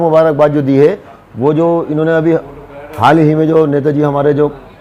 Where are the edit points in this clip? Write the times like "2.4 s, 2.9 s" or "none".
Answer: none